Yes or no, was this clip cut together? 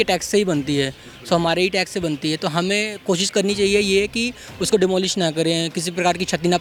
no